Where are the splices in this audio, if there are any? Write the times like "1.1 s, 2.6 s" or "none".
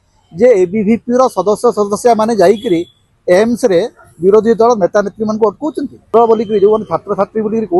6.1 s